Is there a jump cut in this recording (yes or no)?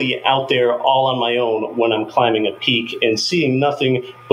no